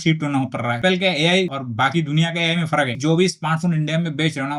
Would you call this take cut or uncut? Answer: cut